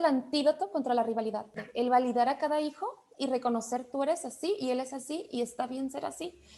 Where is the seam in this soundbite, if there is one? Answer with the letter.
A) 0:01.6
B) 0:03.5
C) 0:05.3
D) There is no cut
A